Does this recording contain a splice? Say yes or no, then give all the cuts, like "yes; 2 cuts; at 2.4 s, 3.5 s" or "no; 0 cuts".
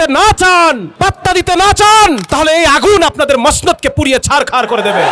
yes; 2 cuts; at 0.9 s, 2.2 s